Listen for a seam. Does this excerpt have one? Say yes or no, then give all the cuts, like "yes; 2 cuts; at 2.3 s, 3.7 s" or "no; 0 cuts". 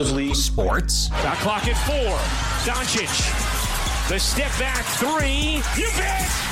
no; 0 cuts